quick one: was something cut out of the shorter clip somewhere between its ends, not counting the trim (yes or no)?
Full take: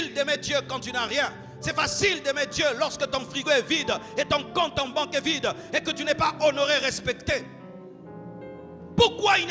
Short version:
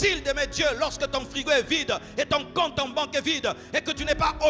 no